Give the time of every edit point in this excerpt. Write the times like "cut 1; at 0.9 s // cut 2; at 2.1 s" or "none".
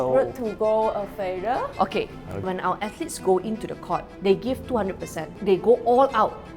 cut 1; at 2.4 s // cut 2; at 4.1 s // cut 3; at 5.4 s